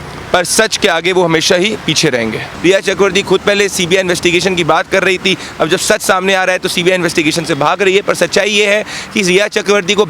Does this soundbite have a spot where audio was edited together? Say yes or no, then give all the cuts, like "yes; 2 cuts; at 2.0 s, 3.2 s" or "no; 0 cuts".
yes; 1 cut; at 2.5 s